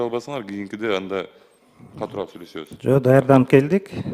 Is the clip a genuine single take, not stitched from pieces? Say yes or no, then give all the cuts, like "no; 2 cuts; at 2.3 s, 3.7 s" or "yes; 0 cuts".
yes; 0 cuts